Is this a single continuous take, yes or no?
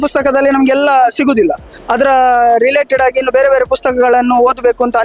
yes